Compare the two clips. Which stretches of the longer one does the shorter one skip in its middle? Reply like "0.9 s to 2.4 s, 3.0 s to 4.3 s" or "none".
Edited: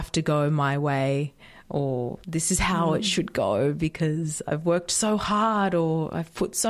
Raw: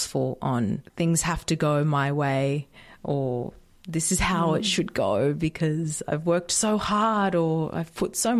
3.5 s to 3.8 s